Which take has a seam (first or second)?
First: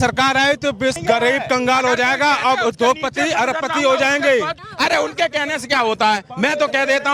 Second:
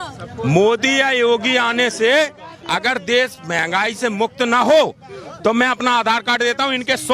first